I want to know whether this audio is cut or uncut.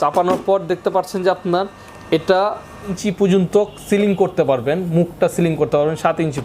cut